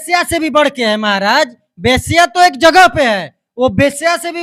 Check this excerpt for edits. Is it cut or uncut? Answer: uncut